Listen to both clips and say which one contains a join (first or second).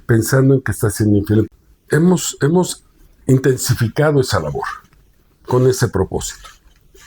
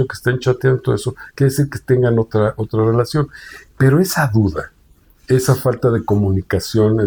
first